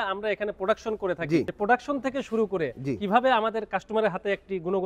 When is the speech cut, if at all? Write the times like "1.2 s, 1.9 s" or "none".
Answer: 1.5 s